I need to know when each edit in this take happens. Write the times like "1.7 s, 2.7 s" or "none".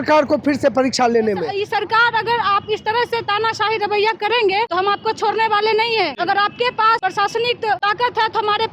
1.5 s, 4.7 s, 6.1 s, 7.0 s, 7.8 s